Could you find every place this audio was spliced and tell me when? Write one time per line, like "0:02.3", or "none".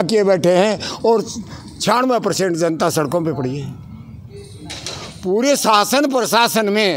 none